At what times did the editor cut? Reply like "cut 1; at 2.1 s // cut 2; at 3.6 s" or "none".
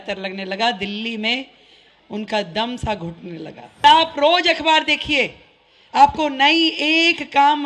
cut 1; at 3.8 s